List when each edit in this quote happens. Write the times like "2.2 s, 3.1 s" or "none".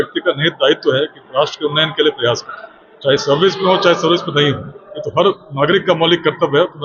none